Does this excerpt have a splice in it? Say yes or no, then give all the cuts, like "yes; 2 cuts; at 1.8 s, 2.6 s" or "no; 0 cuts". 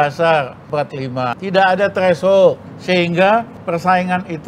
yes; 3 cuts; at 0.9 s, 2.7 s, 3.6 s